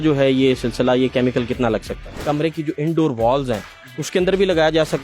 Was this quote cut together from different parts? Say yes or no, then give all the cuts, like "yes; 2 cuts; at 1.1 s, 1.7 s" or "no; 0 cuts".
yes; 1 cut; at 2.1 s